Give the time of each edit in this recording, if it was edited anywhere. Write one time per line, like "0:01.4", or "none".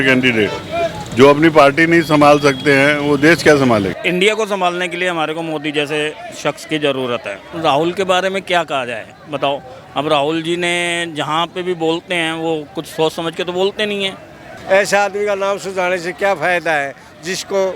0:04.0
0:07.4
0:14.5